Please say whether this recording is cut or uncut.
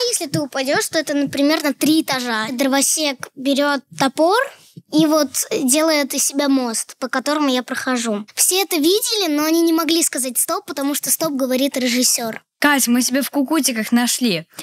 cut